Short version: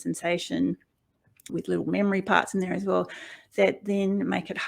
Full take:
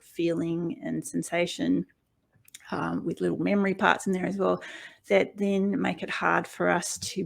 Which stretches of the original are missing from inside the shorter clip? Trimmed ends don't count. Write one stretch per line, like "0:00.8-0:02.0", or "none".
0:02.6-0:03.0